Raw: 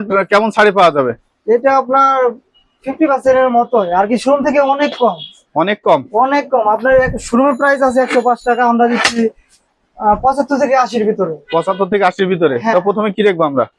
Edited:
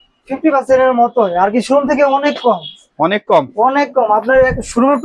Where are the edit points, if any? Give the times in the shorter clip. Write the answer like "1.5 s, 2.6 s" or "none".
none